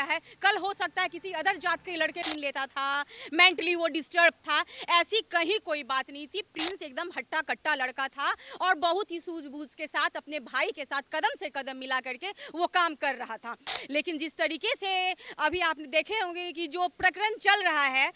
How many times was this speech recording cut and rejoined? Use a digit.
1